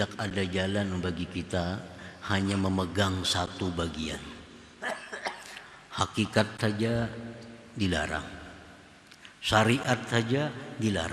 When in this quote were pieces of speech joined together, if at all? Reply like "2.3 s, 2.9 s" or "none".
none